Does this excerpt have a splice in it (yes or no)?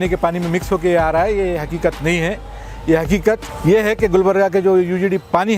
yes